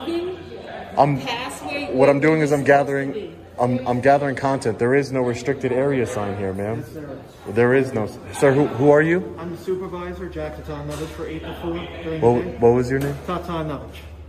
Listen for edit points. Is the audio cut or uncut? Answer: uncut